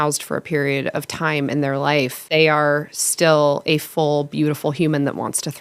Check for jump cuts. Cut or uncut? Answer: cut